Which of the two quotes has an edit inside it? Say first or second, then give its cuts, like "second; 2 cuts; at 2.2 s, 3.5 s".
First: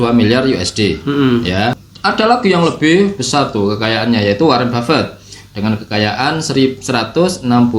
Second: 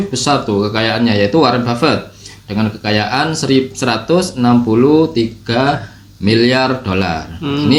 first; 1 cut; at 1.9 s